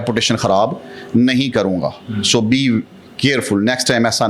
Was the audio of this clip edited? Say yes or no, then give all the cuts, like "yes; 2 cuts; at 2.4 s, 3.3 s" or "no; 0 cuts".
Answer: no; 0 cuts